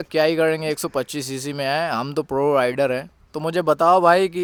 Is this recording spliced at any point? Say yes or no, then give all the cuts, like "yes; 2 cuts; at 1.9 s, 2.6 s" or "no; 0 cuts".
no; 0 cuts